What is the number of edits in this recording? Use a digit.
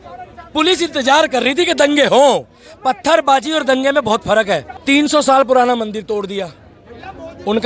1